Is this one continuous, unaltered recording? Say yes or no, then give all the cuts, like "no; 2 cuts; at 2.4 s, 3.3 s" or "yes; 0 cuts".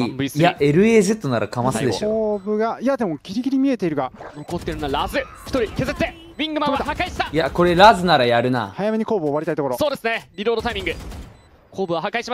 yes; 0 cuts